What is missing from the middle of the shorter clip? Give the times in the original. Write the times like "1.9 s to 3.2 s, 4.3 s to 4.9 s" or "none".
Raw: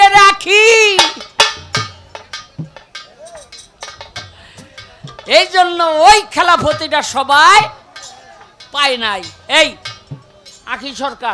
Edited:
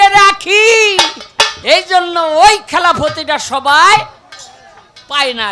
1.6 s to 5.2 s